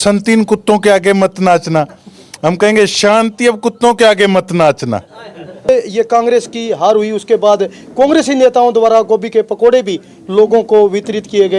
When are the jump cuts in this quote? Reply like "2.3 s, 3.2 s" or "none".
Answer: 5.7 s